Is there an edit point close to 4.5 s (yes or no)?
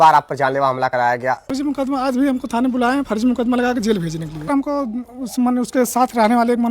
yes